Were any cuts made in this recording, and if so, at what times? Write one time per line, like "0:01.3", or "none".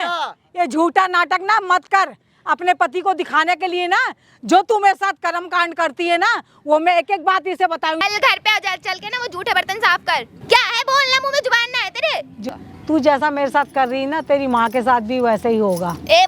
0:08.0
0:10.3
0:12.5